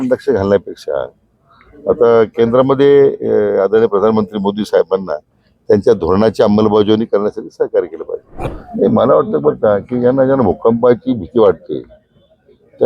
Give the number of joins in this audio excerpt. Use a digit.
1